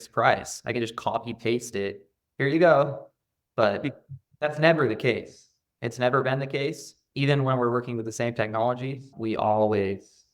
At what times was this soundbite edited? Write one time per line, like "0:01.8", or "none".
0:09.1